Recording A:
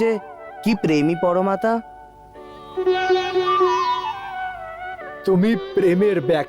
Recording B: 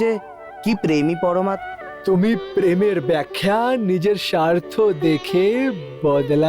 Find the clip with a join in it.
B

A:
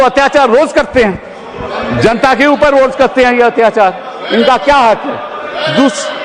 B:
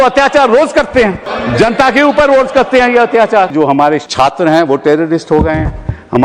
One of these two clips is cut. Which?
B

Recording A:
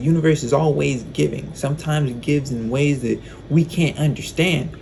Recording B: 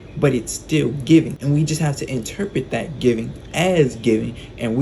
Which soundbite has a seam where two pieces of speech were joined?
B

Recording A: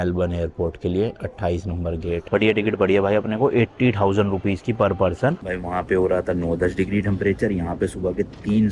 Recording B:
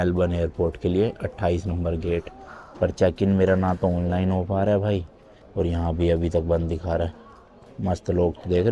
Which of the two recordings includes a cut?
A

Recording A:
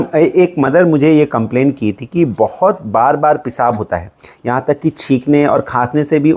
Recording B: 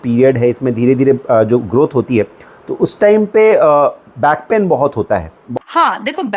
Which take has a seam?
B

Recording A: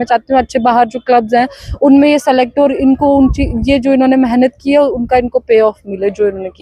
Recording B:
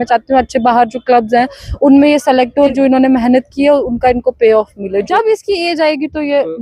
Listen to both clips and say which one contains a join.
B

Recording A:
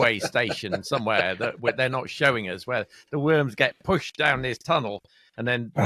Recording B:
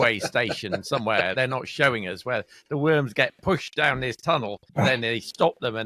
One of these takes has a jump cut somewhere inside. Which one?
B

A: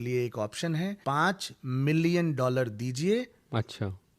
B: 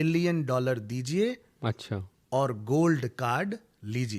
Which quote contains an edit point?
A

